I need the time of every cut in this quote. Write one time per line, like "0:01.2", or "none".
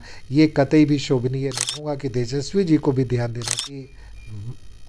0:01.9
0:03.5